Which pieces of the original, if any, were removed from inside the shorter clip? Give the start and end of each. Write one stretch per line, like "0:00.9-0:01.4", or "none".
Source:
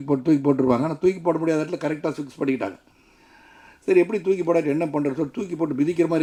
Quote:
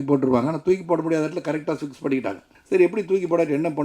0:02.9-0:03.7